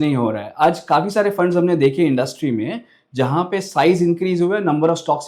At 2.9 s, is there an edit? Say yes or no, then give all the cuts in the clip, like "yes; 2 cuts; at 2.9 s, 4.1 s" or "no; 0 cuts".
no; 0 cuts